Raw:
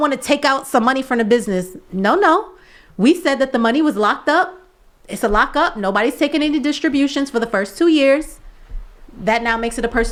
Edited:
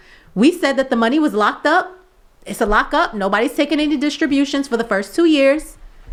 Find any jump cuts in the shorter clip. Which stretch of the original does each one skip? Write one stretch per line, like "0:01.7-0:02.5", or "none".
none